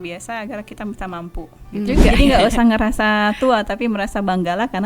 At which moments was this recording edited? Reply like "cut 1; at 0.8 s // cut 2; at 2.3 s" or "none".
cut 1; at 1.8 s